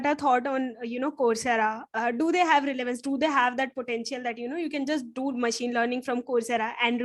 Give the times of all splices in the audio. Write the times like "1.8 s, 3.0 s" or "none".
none